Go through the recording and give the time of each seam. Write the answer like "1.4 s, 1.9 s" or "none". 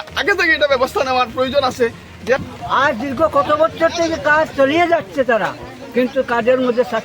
2.4 s